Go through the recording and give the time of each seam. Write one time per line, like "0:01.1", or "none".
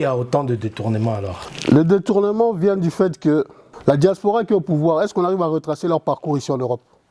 0:01.4
0:03.6